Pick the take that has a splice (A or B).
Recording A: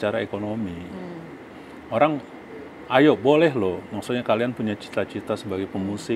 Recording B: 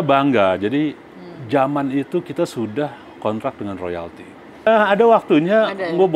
B